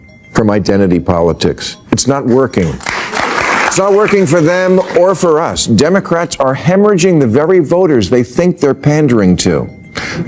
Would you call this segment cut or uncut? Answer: cut